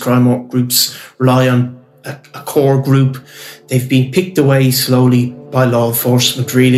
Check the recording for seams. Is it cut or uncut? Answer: cut